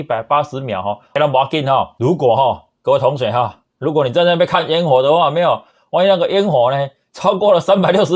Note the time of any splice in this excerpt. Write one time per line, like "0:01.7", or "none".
0:01.1
0:01.9